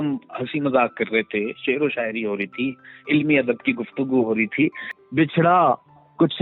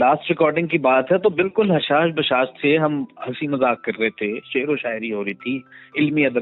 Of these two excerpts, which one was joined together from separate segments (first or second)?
first